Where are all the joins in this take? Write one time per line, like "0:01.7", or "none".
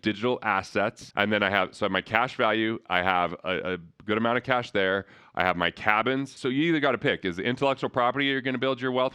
0:01.0
0:06.3